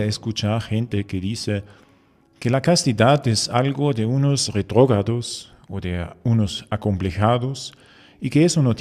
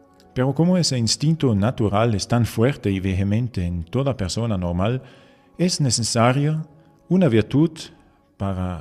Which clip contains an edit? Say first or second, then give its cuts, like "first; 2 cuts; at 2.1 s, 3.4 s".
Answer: second; 1 cut; at 0.9 s